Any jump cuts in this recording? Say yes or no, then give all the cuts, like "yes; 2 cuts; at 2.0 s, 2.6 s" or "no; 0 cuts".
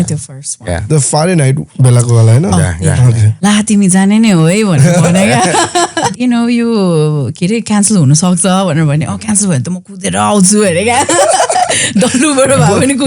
yes; 2 cuts; at 3.2 s, 6.1 s